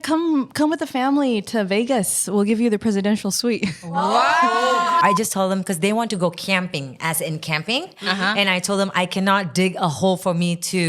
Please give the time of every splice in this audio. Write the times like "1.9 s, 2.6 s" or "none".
5.0 s